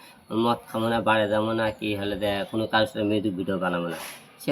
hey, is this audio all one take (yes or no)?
yes